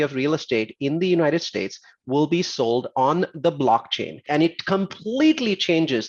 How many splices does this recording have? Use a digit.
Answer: 1